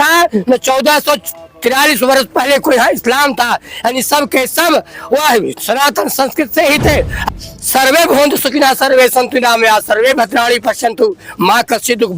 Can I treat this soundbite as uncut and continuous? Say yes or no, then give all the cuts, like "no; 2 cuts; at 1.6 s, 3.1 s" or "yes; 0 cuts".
no; 1 cut; at 7.2 s